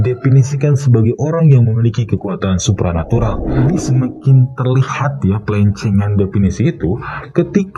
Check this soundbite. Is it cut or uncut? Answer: cut